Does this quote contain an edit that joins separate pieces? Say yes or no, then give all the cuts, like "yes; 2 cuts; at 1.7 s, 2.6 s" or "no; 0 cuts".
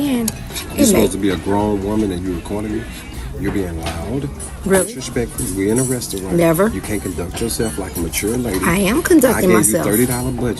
no; 0 cuts